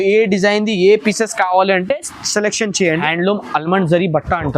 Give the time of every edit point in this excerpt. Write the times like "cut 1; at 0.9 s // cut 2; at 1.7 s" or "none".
cut 1; at 3.0 s